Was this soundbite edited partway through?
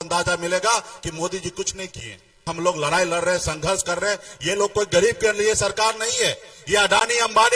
yes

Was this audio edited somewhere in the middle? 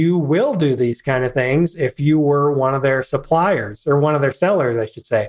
no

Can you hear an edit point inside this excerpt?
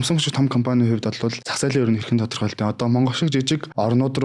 no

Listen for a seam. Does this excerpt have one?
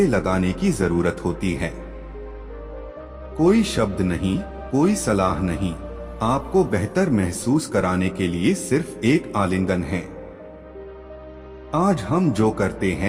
yes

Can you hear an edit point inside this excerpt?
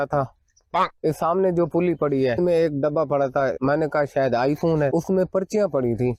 no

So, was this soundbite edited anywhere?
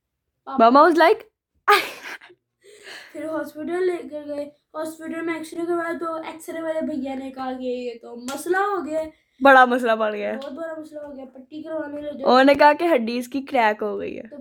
no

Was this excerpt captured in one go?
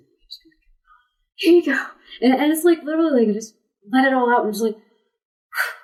yes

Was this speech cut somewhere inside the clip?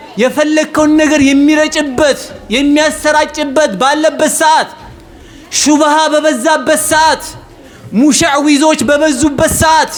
no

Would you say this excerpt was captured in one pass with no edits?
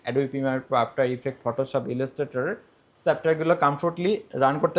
yes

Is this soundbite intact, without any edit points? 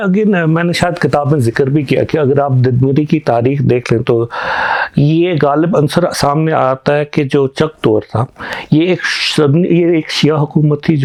yes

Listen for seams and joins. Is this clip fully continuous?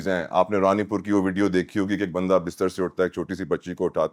yes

